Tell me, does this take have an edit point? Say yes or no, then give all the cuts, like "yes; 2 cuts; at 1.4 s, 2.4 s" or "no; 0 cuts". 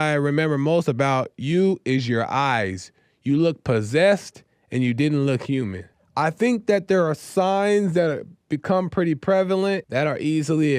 yes; 2 cuts; at 6.0 s, 9.8 s